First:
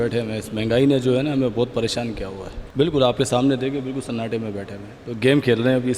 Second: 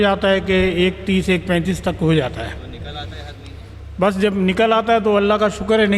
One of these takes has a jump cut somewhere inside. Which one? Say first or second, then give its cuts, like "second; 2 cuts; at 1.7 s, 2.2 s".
first; 1 cut; at 2.6 s